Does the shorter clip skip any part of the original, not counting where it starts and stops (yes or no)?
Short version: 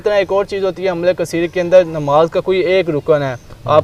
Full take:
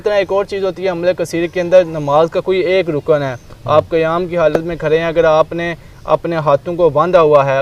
no